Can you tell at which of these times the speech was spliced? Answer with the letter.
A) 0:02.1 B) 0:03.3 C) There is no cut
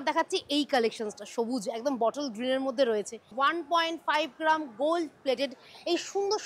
B